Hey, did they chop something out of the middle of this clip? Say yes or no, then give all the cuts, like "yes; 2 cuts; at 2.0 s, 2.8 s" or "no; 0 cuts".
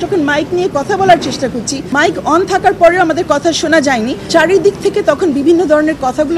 yes; 2 cuts; at 1.8 s, 4.3 s